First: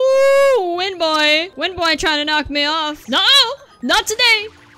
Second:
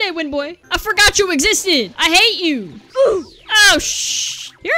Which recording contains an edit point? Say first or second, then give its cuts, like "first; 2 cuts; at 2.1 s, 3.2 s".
first; 1 cut; at 3.0 s